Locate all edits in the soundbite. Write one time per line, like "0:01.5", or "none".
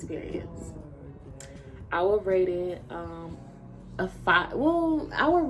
none